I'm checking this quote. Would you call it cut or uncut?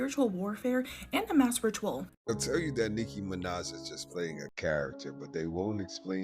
cut